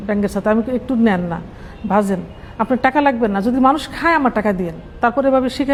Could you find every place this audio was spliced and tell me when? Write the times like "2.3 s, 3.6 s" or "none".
none